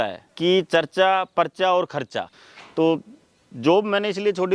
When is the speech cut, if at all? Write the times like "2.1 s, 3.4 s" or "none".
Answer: 2.3 s